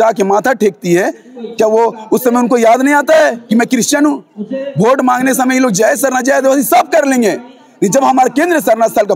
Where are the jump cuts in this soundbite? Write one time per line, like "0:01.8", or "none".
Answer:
none

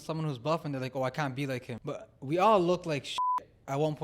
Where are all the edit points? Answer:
0:01.7

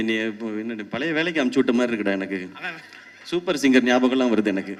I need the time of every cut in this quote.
none

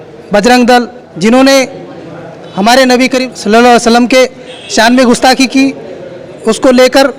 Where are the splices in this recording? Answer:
0:01.0
0:03.3

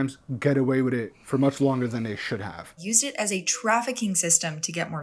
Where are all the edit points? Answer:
0:02.8

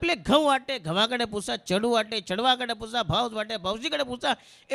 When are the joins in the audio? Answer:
none

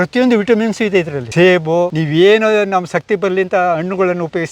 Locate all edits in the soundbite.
0:01.2
0:02.0

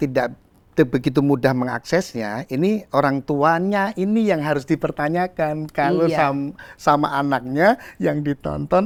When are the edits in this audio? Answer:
none

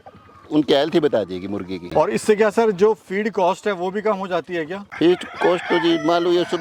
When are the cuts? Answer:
none

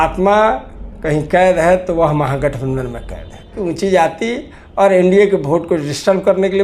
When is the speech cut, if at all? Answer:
0:03.5

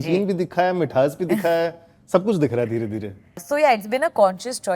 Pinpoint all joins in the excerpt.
0:03.4

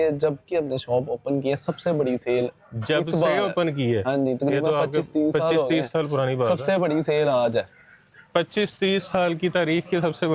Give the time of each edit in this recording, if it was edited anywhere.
none

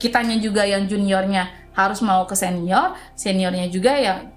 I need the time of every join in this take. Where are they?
none

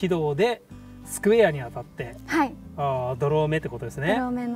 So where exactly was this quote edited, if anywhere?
none

